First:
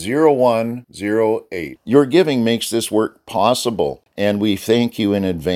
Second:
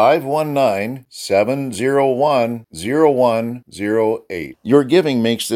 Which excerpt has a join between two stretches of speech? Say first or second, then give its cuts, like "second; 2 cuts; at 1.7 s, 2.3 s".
first; 1 cut; at 4.0 s